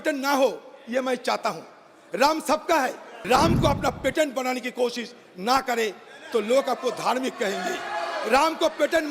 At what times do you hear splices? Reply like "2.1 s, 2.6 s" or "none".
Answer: 3.1 s